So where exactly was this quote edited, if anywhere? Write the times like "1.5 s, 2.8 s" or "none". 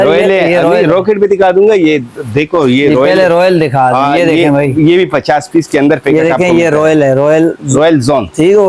none